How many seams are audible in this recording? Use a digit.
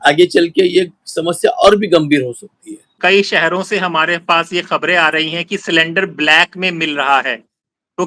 1